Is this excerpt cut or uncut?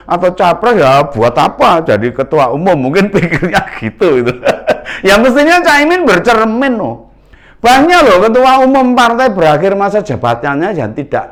uncut